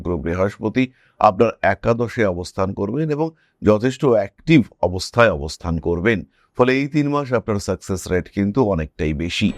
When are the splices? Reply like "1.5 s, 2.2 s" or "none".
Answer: none